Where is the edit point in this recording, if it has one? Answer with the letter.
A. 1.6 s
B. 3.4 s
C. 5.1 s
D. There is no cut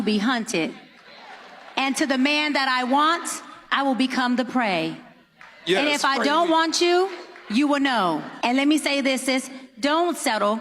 C